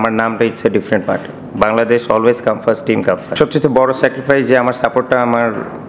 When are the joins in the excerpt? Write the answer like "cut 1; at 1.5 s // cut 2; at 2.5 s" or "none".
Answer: cut 1; at 3.3 s